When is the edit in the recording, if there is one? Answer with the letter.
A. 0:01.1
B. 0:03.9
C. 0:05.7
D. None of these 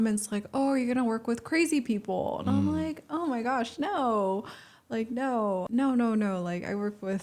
C